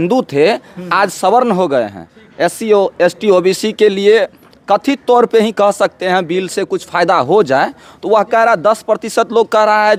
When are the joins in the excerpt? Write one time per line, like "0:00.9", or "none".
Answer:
none

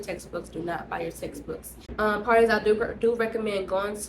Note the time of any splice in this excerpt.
0:01.8

